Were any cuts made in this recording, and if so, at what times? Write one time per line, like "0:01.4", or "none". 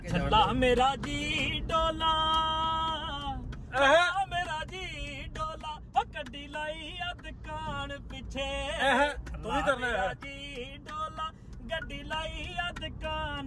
none